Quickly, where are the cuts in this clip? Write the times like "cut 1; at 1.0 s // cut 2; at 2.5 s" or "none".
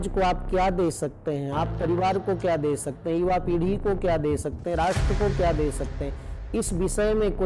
none